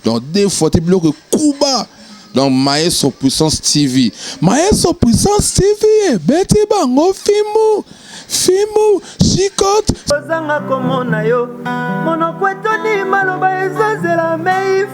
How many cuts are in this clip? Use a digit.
1